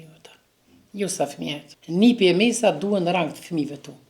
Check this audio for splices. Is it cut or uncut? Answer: cut